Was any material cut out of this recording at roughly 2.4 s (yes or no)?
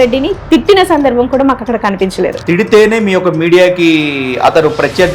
yes